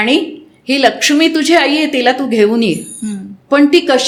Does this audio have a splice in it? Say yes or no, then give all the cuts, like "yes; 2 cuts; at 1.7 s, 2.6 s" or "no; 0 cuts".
no; 0 cuts